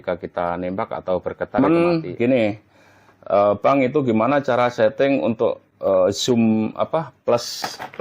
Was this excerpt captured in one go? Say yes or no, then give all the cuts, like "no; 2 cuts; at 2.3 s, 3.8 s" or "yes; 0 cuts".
no; 1 cut; at 1.6 s